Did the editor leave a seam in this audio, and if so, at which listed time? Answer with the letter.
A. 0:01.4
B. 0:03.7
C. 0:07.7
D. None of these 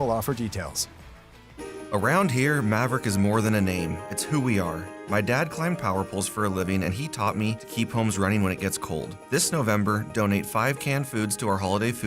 A